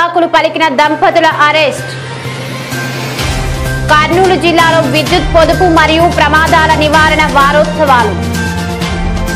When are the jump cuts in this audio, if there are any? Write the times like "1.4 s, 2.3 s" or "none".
8.2 s

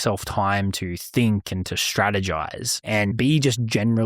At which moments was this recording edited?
3.1 s

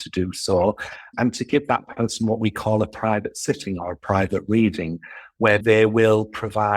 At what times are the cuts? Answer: 1.1 s, 5.6 s

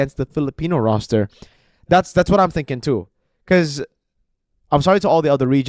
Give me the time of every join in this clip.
none

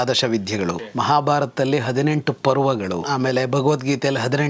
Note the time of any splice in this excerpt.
0.9 s, 3.0 s

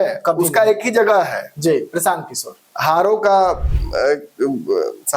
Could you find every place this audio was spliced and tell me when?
none

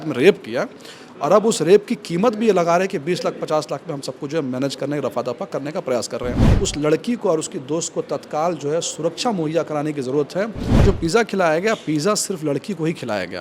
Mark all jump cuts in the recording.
6.5 s, 10.8 s

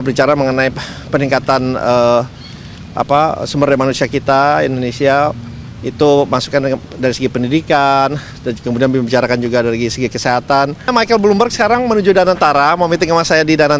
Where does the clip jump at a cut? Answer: 10.9 s

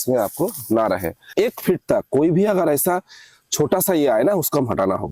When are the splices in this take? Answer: 1.3 s

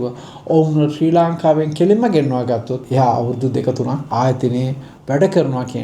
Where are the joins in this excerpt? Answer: 2.8 s, 4.1 s

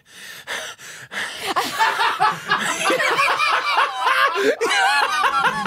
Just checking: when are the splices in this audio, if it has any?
none

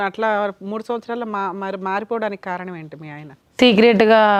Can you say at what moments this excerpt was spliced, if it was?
none

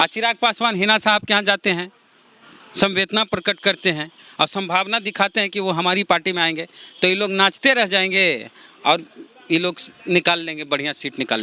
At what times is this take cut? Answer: none

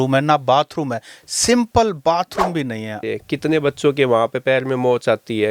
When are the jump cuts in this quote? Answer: 3.0 s

